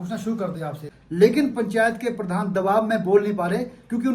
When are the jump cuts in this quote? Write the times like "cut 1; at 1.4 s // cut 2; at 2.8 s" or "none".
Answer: cut 1; at 1.0 s